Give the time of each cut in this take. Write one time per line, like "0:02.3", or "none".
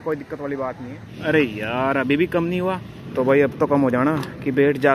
0:01.0
0:02.9